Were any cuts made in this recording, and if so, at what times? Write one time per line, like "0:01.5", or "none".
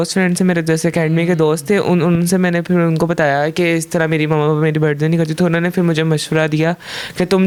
none